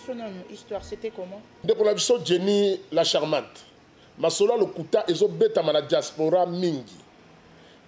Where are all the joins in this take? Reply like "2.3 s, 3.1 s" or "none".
1.5 s